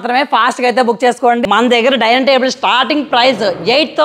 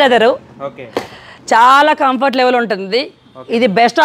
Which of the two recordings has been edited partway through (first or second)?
first